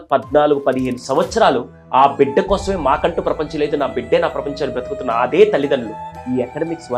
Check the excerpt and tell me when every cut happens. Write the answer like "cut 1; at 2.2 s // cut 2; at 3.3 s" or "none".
cut 1; at 6.1 s